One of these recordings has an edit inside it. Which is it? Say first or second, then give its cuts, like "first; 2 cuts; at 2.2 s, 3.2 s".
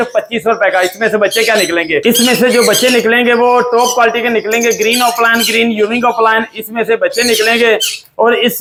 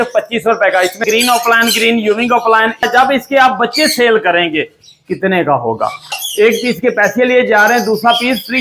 second; 3 cuts; at 1.0 s, 2.8 s, 6.2 s